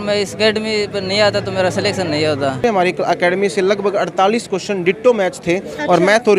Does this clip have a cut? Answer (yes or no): yes